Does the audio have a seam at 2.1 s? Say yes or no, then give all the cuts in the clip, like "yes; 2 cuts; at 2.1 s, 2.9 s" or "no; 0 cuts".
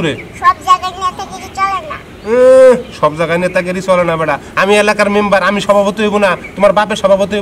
no; 0 cuts